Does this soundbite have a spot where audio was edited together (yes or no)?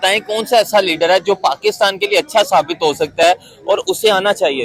no